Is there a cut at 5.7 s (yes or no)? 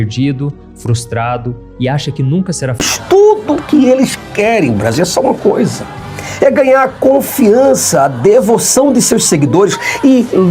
no